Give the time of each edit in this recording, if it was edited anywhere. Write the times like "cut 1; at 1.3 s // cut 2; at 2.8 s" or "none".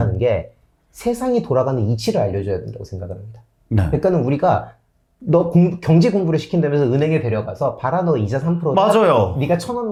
none